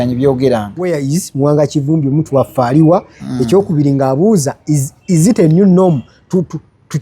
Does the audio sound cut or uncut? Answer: cut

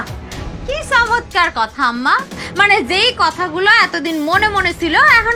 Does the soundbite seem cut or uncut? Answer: uncut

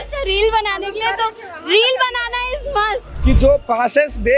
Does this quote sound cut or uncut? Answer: cut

